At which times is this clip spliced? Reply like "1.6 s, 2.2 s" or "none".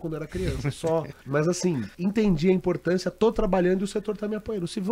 1.2 s, 1.9 s